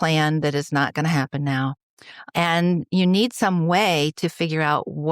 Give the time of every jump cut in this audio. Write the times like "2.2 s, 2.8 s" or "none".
2.3 s